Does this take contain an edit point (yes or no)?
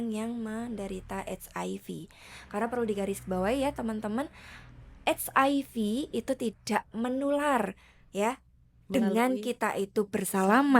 yes